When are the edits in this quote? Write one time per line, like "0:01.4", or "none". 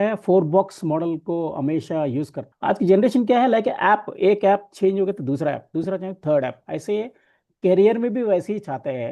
0:02.4